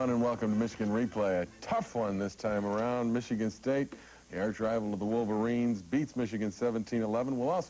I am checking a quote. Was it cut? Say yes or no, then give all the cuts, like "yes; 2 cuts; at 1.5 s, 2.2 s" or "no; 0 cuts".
yes; 1 cut; at 2.3 s